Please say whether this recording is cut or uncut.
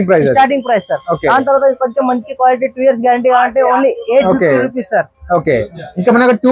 uncut